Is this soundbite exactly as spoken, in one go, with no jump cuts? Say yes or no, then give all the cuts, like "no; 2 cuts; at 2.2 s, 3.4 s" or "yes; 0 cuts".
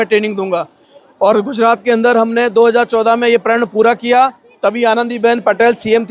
yes; 0 cuts